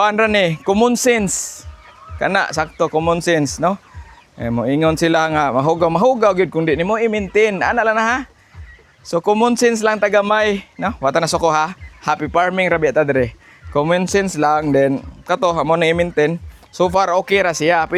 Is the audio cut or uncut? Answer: uncut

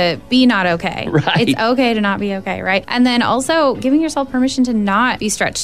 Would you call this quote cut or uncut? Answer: uncut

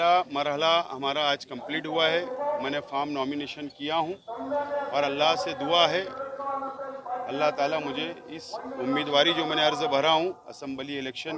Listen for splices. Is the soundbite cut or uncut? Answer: cut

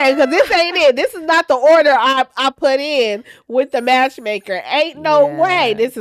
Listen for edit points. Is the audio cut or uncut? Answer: uncut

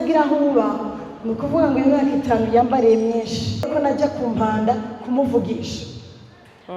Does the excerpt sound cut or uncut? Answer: cut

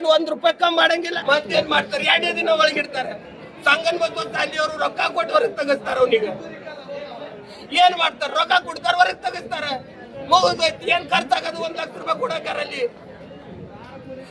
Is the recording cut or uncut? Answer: cut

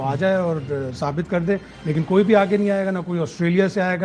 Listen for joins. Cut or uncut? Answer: uncut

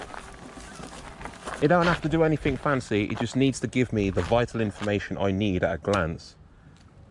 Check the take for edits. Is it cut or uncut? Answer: cut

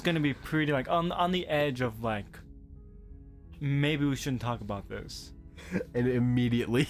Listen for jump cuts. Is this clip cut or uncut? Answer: uncut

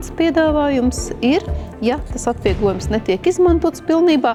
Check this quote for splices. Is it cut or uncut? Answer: uncut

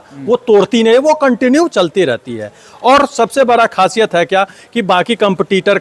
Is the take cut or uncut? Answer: uncut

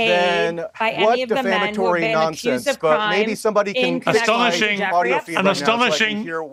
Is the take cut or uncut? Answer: uncut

